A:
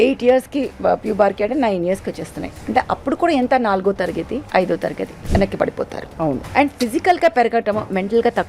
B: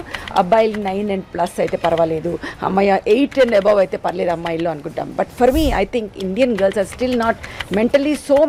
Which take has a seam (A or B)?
A